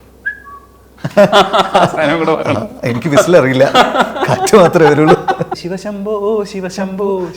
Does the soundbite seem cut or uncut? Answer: cut